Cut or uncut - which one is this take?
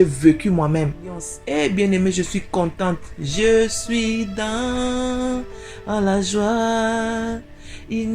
cut